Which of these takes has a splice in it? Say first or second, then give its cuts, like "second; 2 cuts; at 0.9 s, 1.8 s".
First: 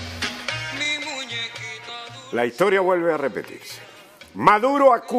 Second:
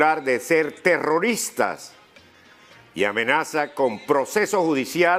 second; 1 cut; at 3.5 s